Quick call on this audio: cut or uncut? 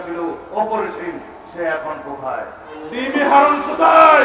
cut